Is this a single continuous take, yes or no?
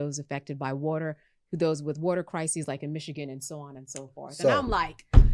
yes